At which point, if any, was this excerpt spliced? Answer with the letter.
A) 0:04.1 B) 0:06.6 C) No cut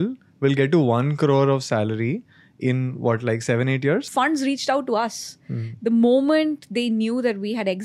A